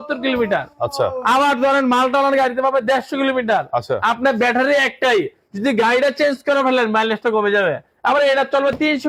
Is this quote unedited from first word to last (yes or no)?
yes